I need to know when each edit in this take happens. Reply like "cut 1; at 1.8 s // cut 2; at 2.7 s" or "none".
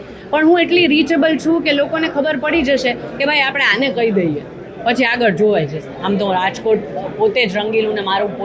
cut 1; at 5.9 s